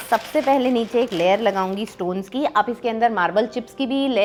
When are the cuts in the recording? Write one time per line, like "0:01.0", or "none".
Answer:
none